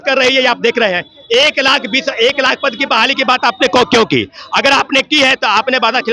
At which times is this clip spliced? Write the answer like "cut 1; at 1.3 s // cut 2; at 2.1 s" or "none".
none